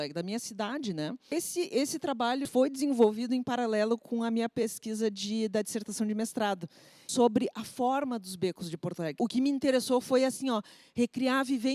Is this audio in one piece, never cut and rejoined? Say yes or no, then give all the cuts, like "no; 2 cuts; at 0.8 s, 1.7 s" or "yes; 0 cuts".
no; 4 cuts; at 1.3 s, 2.5 s, 7.0 s, 9.2 s